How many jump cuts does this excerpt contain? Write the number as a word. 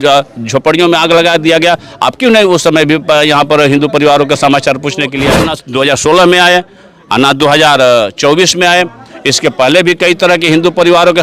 one